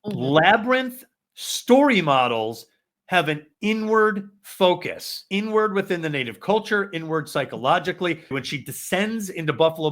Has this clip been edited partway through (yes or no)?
yes